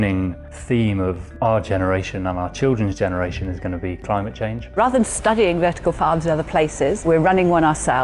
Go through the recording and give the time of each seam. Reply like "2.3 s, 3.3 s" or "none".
4.6 s, 7.0 s